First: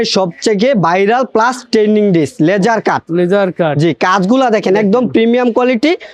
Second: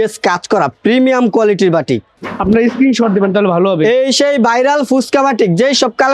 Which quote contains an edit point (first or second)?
second